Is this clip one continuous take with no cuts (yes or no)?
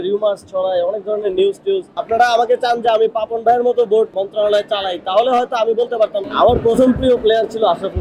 no